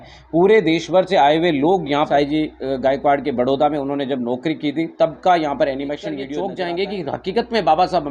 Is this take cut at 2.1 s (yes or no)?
yes